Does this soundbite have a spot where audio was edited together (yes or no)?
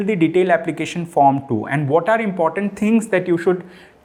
no